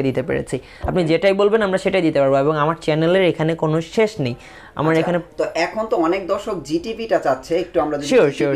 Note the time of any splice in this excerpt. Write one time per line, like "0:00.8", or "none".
none